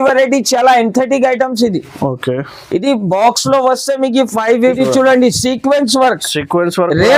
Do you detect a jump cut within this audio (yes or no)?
yes